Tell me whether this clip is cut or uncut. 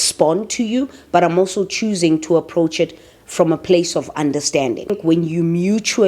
uncut